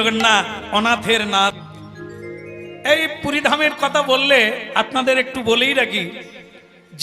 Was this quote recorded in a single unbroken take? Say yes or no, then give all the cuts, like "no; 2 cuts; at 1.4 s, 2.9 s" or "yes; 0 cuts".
no; 1 cut; at 1.6 s